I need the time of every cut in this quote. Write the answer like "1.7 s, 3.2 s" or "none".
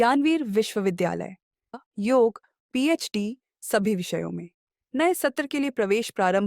1.7 s

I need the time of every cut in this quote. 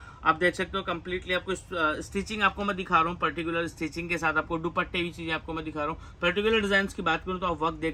none

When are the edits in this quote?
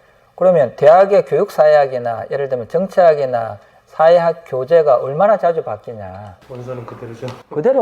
6.4 s

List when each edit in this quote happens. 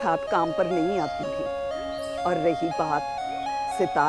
none

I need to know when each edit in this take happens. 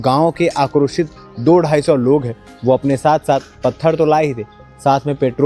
none

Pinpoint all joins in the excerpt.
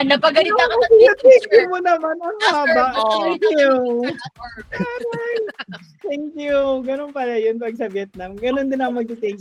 none

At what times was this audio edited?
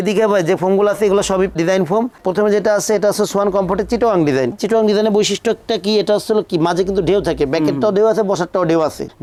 none

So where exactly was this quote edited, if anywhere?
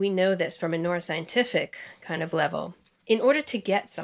none

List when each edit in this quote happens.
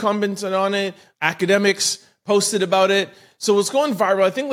1.2 s

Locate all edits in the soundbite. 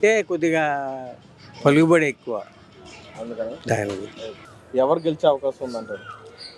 none

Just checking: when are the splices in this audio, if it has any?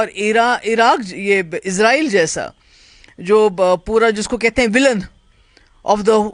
none

